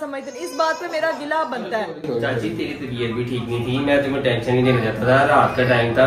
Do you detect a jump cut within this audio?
no; 0 cuts

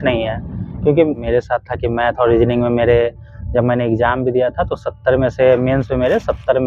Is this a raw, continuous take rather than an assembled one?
no; 1 cut; at 1.2 s

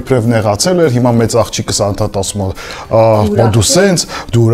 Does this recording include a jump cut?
no; 0 cuts

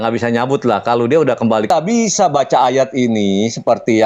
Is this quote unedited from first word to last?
no; 1 cut; at 1.7 s

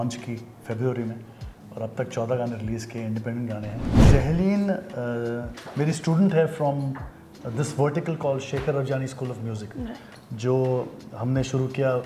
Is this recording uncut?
no; 1 cut; at 4.0 s

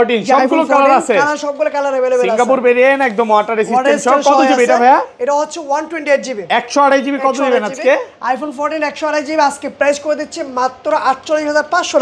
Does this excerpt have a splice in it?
no; 0 cuts

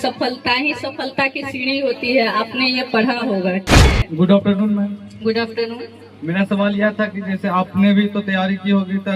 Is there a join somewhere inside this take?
yes; 1 cut; at 3.8 s

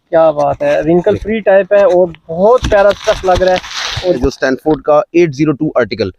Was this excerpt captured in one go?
no; 1 cut; at 4.2 s

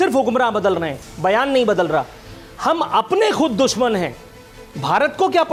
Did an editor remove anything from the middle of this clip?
no; 0 cuts

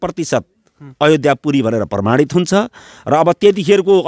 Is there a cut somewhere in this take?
no; 0 cuts

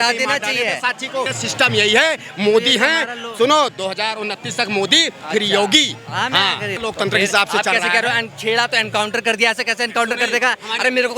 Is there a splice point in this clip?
yes; 2 cuts; at 1.3 s, 6.7 s

